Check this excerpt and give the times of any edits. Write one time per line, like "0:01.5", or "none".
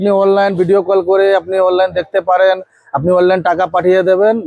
none

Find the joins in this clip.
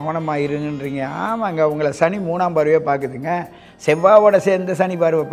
none

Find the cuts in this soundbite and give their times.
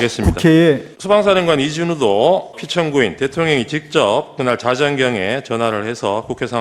0:00.9
0:02.6

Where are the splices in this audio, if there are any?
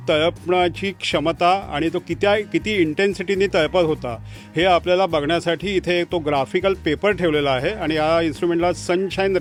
none

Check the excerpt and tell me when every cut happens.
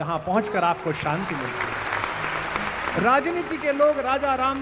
none

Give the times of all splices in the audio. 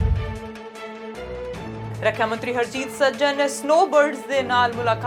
none

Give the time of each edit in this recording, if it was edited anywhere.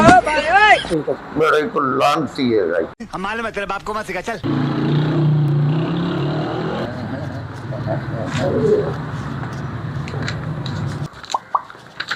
none

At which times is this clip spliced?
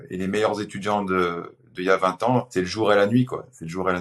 0:02.5

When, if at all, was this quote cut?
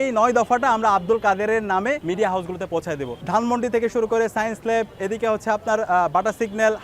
0:03.2

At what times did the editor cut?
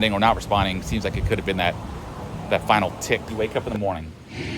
0:03.3

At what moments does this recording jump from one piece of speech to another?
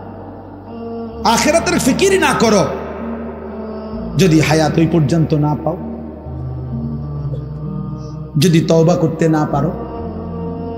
0:09.8

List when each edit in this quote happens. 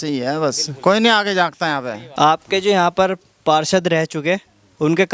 0:02.0

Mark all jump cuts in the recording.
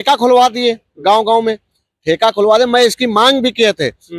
none

